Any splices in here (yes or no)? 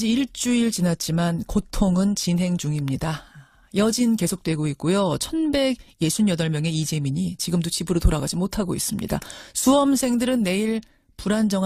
no